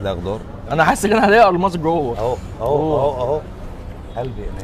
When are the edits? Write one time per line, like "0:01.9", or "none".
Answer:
0:02.1